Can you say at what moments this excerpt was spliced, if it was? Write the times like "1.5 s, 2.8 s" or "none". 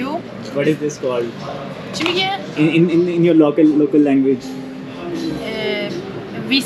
none